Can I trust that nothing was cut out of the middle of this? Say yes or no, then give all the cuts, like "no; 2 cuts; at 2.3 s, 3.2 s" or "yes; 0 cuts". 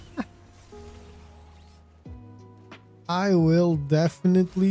yes; 0 cuts